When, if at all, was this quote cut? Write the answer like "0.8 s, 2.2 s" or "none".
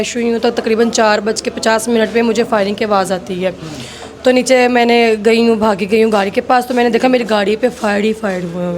none